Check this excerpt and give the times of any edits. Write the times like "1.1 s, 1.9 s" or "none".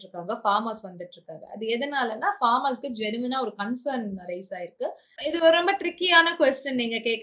5.2 s